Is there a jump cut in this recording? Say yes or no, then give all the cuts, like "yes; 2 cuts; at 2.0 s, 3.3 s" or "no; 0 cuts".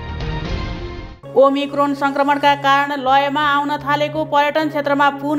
yes; 1 cut; at 1.1 s